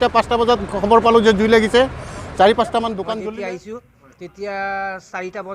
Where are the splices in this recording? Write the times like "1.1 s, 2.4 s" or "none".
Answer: 3.1 s